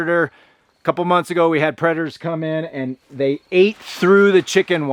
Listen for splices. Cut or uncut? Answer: uncut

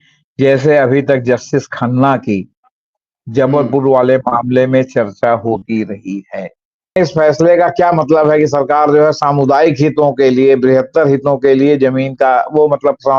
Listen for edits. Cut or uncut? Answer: cut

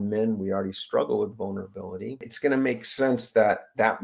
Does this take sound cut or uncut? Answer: cut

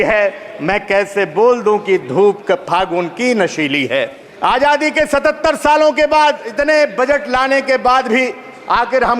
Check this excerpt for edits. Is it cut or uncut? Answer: cut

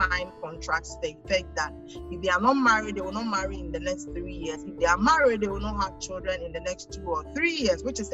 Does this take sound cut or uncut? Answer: uncut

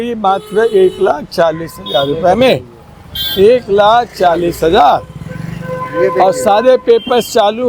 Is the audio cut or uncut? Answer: uncut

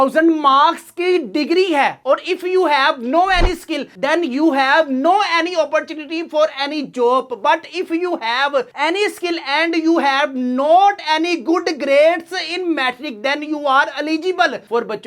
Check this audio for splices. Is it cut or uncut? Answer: uncut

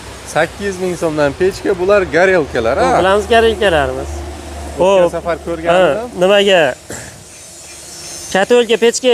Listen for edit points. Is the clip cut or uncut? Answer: uncut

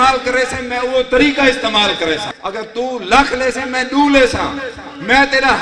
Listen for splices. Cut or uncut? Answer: cut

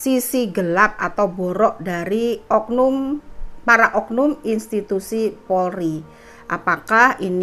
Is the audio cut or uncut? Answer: uncut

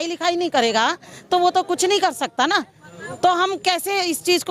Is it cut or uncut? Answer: uncut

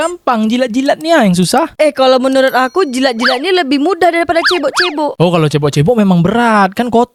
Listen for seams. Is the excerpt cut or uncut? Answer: uncut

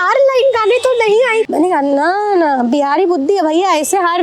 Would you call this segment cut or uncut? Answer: cut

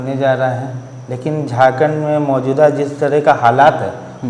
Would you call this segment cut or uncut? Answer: uncut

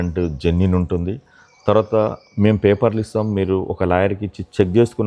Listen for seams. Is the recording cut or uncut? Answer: uncut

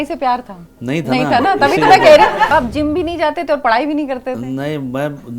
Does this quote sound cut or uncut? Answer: cut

